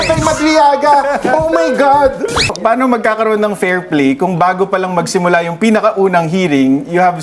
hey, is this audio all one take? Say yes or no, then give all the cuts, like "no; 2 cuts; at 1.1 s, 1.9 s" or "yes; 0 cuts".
no; 1 cut; at 2.5 s